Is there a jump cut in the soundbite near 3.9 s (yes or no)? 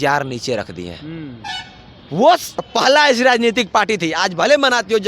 no